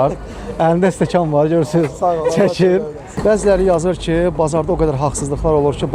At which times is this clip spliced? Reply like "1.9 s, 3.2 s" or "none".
3.0 s

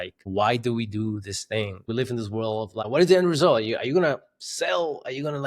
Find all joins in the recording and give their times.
1.8 s

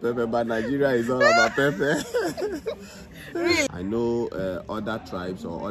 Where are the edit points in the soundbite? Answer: 3.7 s

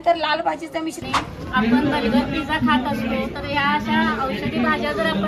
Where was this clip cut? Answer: 1.0 s

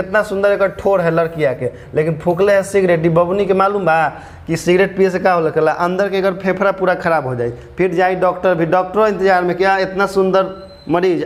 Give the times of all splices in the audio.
none

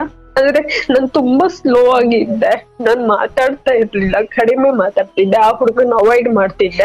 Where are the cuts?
none

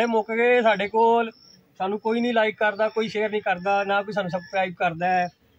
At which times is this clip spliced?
none

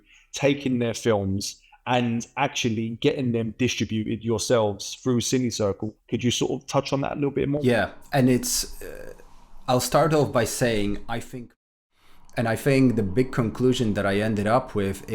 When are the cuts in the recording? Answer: 5.9 s, 7.6 s, 11.6 s

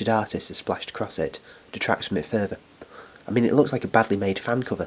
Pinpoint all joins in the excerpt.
none

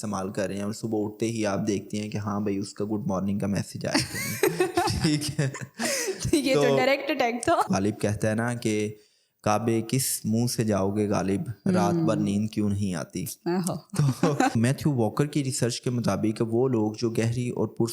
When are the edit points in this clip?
7.7 s, 14.5 s

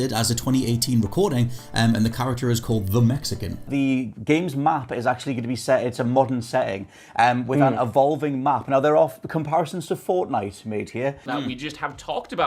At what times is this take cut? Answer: 3.7 s, 11.2 s

